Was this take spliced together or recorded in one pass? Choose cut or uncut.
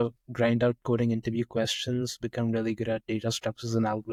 uncut